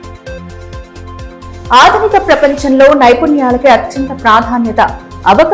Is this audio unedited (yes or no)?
no